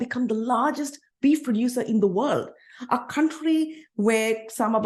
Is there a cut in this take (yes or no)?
no